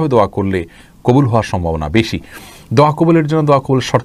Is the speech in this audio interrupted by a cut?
no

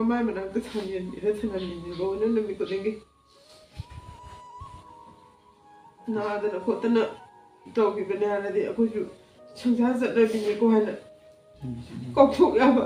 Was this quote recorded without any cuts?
yes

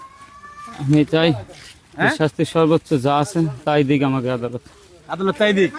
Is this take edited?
no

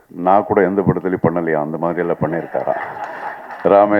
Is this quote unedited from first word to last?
yes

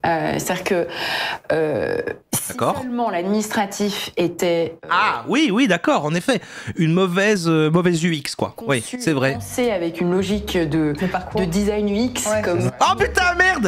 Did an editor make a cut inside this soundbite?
no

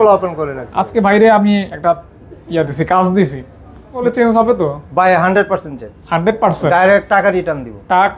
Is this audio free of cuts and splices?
no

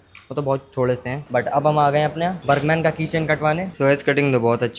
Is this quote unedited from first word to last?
no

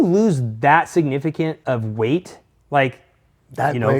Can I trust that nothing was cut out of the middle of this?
no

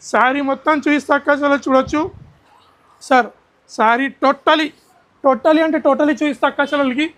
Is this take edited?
no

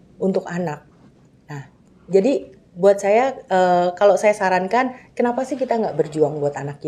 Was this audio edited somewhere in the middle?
no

